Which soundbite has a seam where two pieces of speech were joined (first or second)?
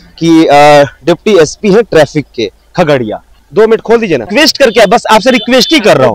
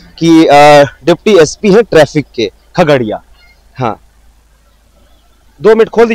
first